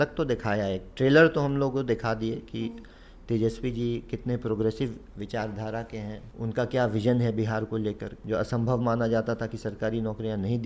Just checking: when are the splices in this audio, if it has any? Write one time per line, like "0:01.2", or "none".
0:06.3
0:08.1